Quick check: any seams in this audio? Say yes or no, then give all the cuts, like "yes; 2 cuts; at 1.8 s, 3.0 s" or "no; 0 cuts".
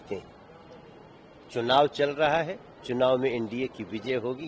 no; 0 cuts